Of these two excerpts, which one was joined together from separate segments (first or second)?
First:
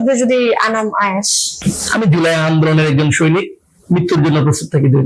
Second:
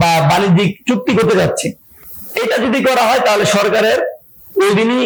first